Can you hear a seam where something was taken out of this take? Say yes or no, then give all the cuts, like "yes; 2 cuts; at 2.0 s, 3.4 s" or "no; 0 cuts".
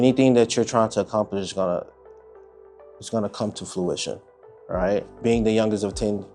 yes; 1 cut; at 5.2 s